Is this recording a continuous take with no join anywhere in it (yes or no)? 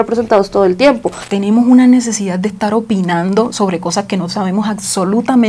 no